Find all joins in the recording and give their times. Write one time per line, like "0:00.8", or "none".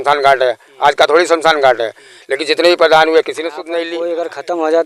0:03.9